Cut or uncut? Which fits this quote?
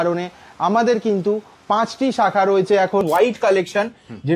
cut